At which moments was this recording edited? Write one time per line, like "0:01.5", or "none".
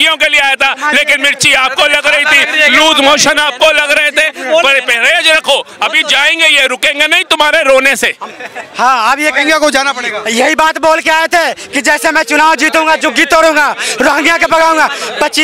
none